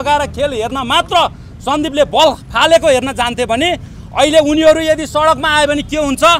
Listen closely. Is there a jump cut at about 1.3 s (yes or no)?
no